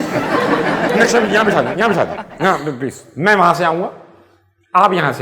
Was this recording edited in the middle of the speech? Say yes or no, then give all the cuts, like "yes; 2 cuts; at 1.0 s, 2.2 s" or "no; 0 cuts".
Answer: yes; 1 cut; at 0.9 s